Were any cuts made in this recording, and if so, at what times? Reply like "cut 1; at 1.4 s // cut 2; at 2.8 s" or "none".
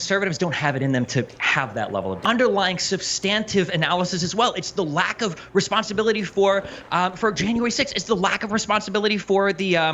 cut 1; at 2.2 s